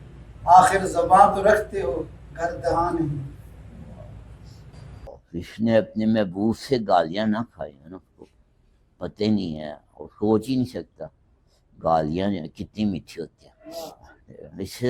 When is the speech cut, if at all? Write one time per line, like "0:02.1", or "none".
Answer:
0:04.7